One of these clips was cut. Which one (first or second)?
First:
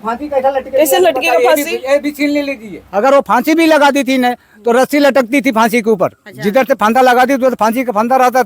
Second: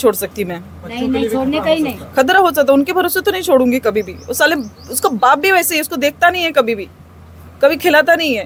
first